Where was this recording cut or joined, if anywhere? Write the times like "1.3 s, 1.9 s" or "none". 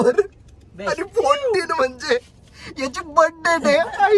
none